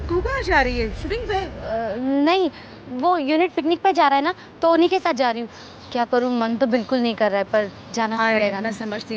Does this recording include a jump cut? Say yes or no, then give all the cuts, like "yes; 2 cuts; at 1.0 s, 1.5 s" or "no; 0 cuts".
no; 0 cuts